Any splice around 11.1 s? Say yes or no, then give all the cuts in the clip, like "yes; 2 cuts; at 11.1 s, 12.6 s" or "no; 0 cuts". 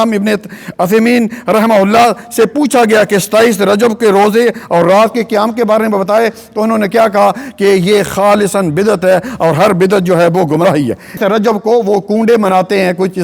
yes; 1 cut; at 11.1 s